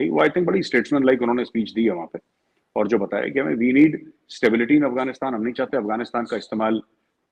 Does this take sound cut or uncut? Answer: uncut